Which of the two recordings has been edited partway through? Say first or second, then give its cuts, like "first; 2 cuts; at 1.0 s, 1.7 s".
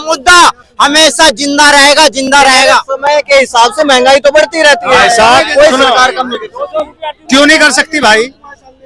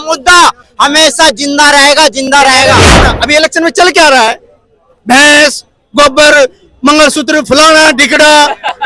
second; 1 cut; at 2.9 s